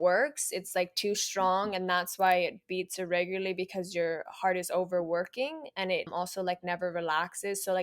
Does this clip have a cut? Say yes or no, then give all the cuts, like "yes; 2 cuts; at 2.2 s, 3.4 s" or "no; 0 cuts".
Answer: yes; 1 cut; at 6.1 s